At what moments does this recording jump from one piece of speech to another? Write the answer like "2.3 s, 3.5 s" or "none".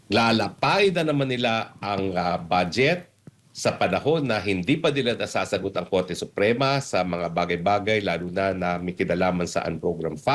none

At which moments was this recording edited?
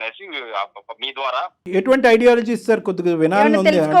1.6 s

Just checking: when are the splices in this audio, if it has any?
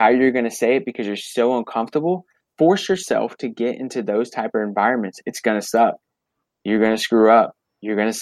2.4 s

